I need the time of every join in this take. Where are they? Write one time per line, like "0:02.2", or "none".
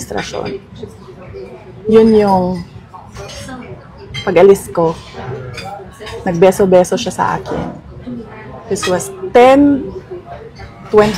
none